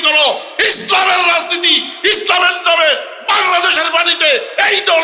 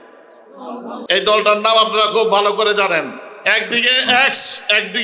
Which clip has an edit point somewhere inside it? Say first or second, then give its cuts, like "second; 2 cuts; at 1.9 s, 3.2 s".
second; 1 cut; at 0.9 s